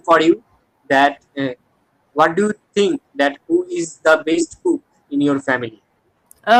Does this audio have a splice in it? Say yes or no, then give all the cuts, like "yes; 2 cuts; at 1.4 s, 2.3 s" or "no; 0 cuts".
no; 0 cuts